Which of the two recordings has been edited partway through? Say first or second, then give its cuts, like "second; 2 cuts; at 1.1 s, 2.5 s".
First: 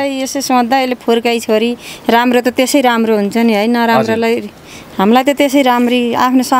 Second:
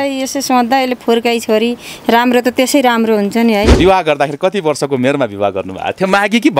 second; 1 cut; at 3.7 s